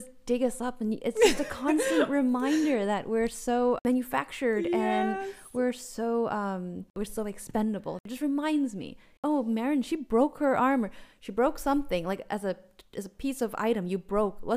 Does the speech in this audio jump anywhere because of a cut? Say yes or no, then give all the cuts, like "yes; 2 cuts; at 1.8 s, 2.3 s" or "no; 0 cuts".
yes; 4 cuts; at 3.8 s, 6.9 s, 8.0 s, 9.1 s